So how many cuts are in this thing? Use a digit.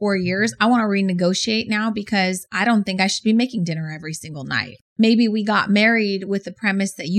1